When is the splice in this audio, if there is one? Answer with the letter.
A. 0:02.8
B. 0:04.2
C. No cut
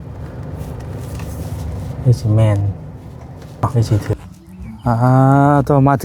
B